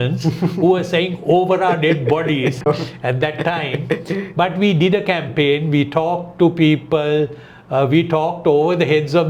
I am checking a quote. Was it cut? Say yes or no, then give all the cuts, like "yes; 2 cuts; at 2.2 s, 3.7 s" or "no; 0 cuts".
no; 0 cuts